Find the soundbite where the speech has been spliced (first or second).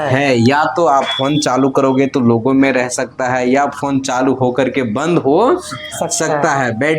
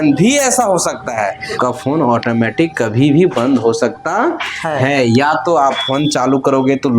second